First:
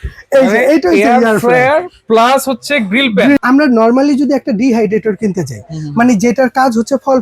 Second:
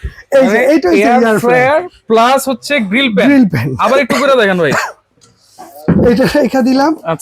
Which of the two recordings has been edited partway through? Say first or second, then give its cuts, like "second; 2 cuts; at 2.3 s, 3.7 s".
first; 1 cut; at 3.4 s